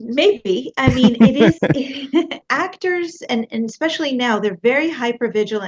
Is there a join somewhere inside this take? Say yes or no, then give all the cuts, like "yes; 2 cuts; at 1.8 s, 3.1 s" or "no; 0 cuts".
yes; 1 cut; at 2.5 s